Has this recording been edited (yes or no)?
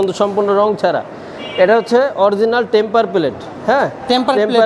no